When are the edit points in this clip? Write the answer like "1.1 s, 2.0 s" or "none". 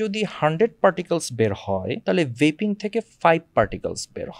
1.9 s